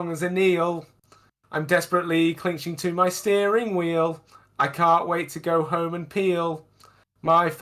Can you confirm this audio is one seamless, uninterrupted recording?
yes; 0 cuts

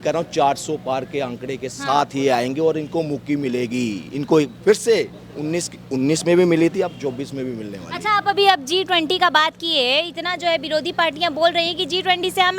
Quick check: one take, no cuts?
yes; 0 cuts

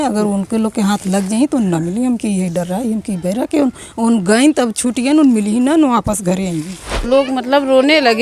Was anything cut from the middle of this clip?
yes; 1 cut; at 7.0 s

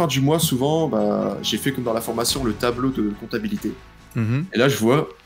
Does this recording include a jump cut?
no; 0 cuts

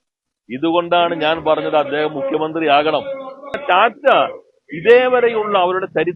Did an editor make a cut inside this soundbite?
yes; 1 cut; at 3.6 s

